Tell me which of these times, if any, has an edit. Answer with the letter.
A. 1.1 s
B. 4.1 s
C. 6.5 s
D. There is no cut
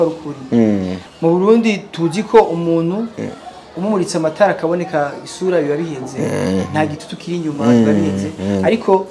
A